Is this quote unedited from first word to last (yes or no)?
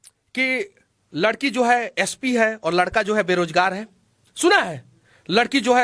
yes